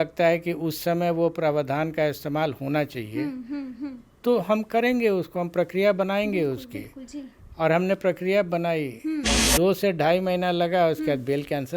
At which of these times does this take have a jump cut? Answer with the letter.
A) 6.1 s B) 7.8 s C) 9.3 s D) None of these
C